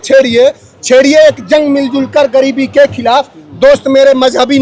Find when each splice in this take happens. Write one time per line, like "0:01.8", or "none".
none